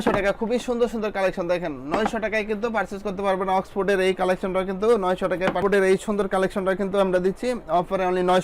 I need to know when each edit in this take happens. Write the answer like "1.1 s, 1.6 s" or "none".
5.6 s